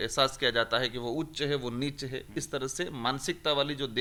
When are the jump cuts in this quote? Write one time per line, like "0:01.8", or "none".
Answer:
none